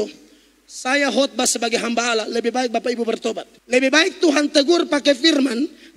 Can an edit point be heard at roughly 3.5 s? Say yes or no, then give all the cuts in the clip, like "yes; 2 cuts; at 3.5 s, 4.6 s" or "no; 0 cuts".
yes; 1 cut; at 3.5 s